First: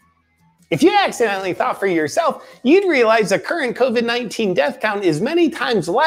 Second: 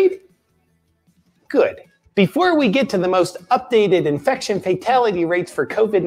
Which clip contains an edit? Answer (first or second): first